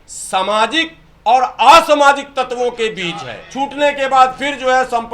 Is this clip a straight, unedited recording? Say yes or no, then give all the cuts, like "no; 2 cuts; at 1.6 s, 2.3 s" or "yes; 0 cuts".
no; 1 cut; at 3.4 s